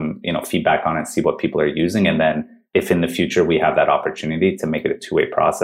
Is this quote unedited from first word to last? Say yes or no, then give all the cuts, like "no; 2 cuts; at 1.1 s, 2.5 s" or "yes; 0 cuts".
no; 1 cut; at 2.7 s